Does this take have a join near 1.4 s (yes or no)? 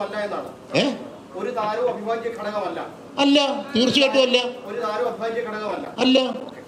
no